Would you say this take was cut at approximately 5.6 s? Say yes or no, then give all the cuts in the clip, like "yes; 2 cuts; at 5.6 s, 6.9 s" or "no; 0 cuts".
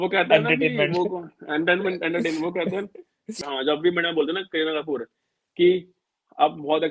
no; 1 cut; at 3.3 s